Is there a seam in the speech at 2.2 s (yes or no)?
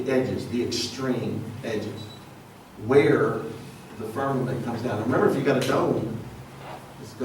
no